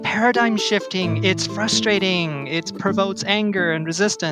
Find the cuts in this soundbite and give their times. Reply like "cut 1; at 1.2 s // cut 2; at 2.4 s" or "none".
cut 1; at 1.1 s